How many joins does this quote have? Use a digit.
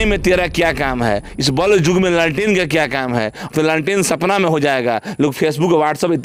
0